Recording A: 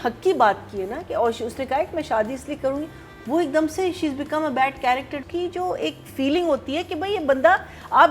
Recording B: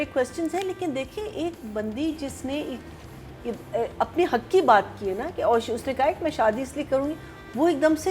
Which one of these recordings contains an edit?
A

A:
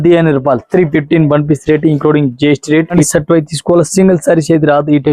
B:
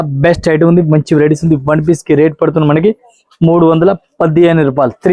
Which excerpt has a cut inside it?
A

